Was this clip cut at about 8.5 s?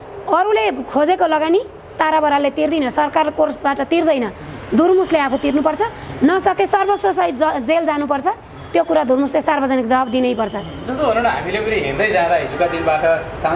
no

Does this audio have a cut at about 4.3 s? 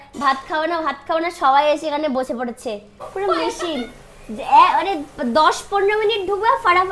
no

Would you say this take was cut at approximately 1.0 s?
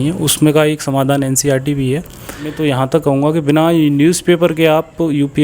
no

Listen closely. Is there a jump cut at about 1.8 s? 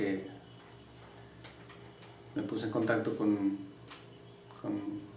no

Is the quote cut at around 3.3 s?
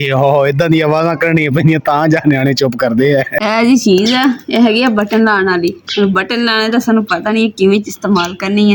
yes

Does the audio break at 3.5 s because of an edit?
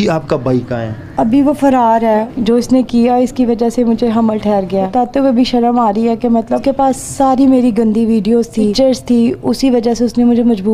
no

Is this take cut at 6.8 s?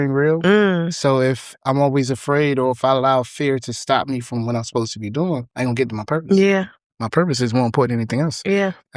no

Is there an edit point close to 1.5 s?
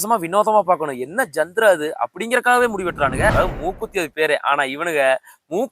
no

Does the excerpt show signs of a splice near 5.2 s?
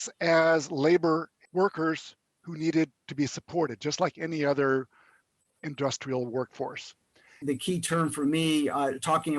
no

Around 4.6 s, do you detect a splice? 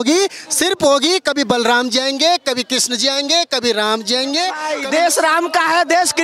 yes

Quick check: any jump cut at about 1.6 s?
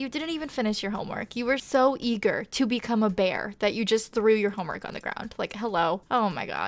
yes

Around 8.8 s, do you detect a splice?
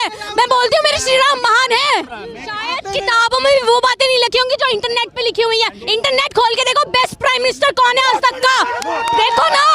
no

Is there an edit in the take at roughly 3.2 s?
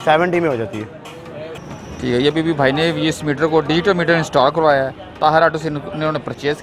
no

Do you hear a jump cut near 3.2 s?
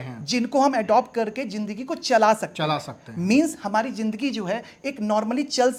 no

